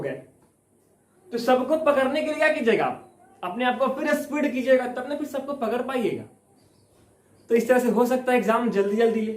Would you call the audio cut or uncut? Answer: uncut